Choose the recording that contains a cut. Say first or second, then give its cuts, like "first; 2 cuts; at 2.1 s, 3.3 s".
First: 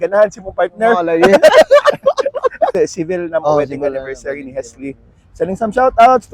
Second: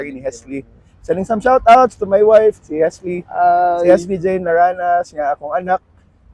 first; 1 cut; at 2.7 s